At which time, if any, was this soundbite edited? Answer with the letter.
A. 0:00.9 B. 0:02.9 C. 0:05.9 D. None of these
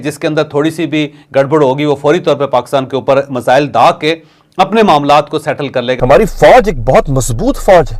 C